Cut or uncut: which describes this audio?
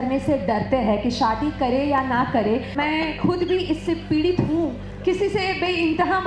cut